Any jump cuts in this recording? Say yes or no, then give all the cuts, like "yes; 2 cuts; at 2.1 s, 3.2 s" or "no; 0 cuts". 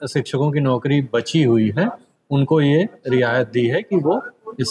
no; 0 cuts